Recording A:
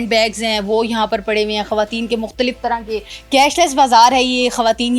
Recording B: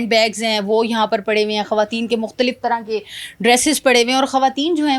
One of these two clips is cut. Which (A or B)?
A